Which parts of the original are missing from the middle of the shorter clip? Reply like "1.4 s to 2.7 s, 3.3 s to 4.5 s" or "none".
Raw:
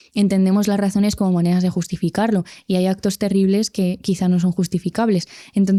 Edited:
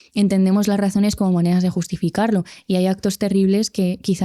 none